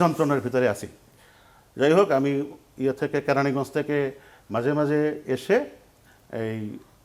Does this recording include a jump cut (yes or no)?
no